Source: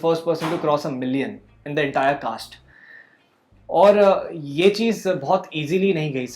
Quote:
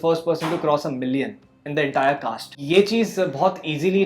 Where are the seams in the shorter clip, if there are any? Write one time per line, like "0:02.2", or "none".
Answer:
0:02.5